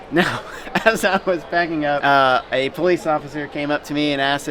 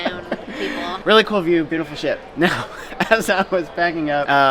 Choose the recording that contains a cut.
second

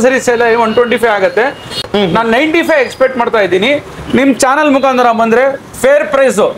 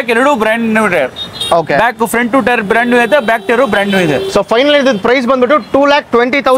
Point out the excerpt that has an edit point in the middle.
first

